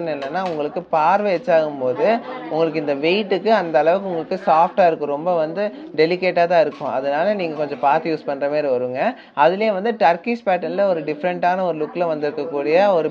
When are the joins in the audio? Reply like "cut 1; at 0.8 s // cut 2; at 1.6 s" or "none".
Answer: none